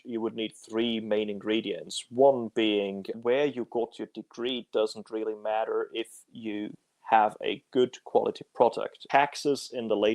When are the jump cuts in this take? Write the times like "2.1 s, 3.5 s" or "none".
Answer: 3.1 s, 8.9 s